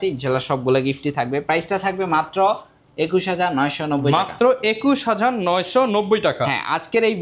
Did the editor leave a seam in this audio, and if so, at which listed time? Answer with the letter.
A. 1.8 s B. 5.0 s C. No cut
C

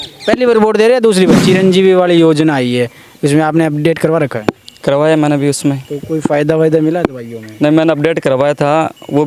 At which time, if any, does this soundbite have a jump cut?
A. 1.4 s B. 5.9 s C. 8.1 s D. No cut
A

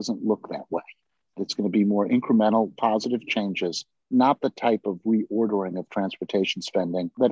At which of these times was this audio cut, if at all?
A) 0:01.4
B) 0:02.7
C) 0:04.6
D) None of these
A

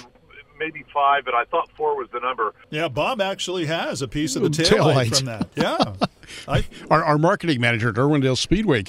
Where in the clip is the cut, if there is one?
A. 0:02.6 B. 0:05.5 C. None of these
A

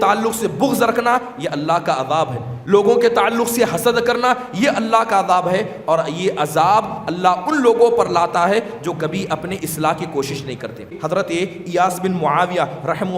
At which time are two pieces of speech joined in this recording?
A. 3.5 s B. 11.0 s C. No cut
B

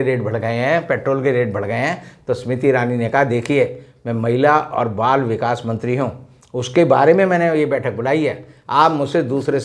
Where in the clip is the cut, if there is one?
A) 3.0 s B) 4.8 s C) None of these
C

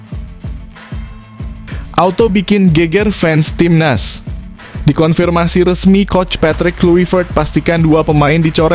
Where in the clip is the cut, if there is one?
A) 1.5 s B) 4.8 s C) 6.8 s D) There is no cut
A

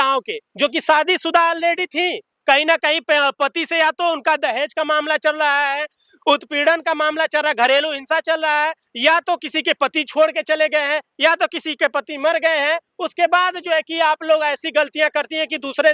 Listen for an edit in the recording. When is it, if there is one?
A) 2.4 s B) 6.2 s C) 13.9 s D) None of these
D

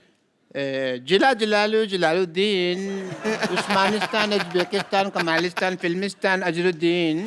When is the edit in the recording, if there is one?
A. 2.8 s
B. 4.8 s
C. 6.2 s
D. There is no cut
D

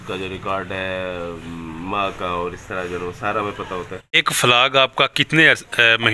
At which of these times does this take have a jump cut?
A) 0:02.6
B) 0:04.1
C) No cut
B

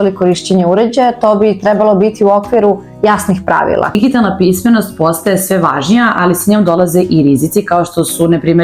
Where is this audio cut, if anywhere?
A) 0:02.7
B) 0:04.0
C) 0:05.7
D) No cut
B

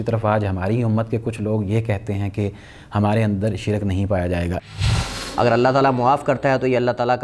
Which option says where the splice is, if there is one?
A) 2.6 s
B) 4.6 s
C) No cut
B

